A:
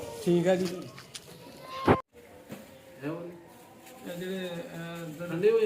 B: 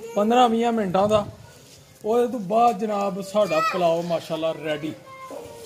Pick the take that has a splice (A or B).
A